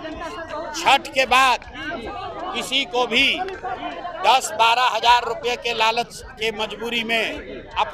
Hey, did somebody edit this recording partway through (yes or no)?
no